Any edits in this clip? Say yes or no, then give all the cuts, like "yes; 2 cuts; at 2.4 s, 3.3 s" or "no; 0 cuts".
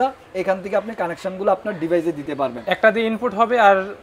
no; 0 cuts